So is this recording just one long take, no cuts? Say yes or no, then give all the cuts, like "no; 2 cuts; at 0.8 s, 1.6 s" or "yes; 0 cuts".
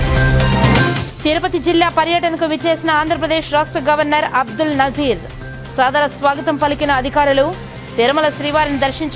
no; 1 cut; at 1.1 s